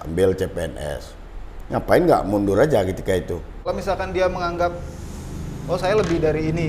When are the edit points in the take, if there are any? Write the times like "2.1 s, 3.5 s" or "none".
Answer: 3.3 s

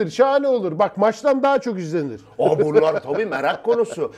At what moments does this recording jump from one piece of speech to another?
none

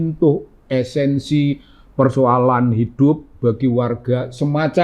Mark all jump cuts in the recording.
none

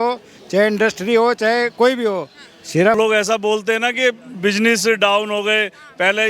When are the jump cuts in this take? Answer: 3.0 s

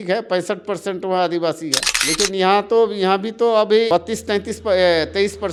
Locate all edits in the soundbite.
none

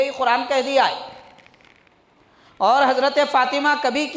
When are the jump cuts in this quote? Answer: none

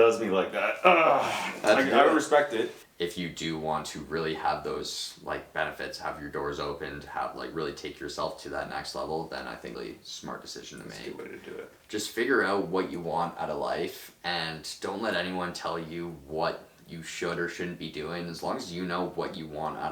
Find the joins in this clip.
2.8 s, 9.8 s, 11.8 s

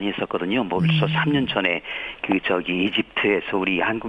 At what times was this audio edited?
1.3 s

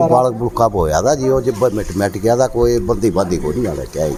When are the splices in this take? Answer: none

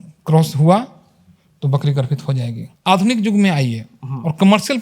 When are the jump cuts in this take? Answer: 2.7 s

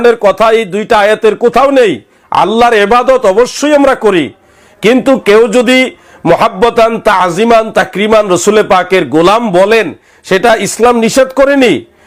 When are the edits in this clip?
none

